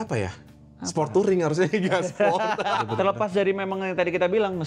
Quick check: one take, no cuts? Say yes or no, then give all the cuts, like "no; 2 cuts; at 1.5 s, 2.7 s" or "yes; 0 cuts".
no; 1 cut; at 2.9 s